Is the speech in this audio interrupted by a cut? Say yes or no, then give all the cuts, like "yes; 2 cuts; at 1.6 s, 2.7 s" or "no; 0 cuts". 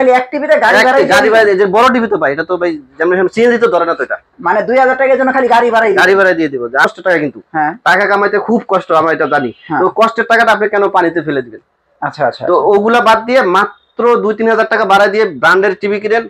yes; 1 cut; at 6.8 s